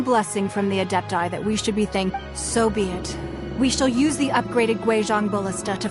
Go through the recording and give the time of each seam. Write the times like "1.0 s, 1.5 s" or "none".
2.2 s